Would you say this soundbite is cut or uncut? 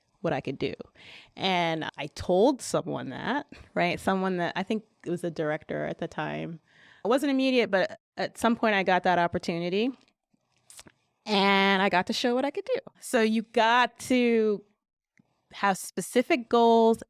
cut